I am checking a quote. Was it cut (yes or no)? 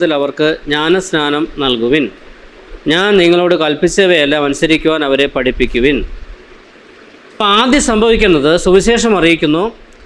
yes